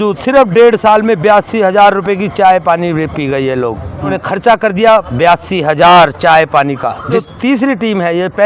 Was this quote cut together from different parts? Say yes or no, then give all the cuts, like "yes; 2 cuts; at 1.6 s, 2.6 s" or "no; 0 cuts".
yes; 2 cuts; at 4.2 s, 7.2 s